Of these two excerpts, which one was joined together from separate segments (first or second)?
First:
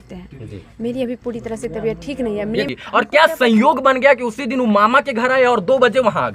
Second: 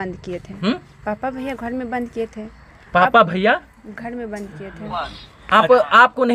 first